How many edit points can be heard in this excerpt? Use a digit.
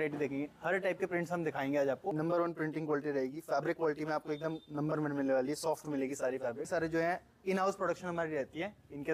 2